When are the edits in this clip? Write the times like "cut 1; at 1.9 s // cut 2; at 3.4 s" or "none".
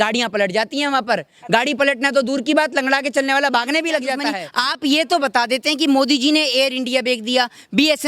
cut 1; at 4.4 s